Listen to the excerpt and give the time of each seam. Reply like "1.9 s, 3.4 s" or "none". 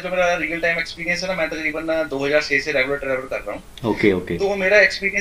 none